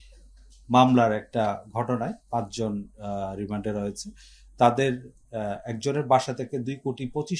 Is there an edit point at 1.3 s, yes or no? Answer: no